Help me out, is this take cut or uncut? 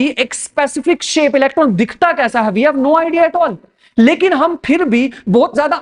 uncut